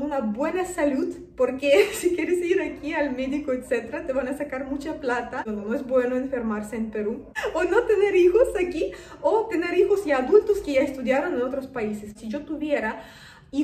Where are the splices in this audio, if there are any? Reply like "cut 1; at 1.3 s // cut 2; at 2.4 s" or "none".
cut 1; at 5.5 s // cut 2; at 7.4 s // cut 3; at 12.2 s

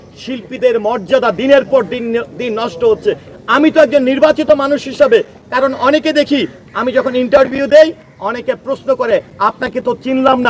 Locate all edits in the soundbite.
none

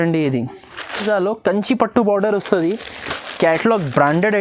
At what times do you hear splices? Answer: cut 1; at 1.0 s

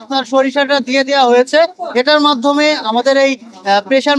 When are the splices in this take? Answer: none

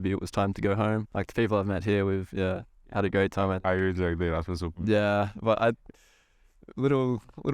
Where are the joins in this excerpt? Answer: cut 1; at 1.1 s

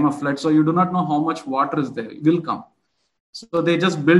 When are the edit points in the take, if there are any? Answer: none

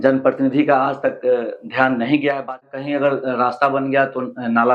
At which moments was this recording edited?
cut 1; at 2.8 s

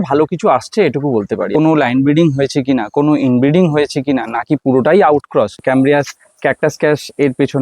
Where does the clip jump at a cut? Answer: cut 1; at 1.5 s // cut 2; at 5.6 s

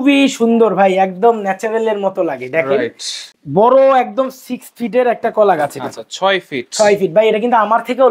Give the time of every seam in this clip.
cut 1; at 3.2 s

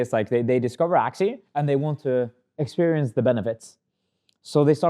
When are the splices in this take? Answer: cut 1; at 1.5 s

